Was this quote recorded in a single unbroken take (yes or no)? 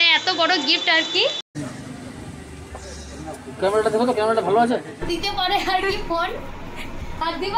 no